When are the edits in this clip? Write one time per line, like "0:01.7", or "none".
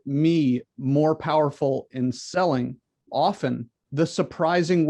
0:03.1
0:03.8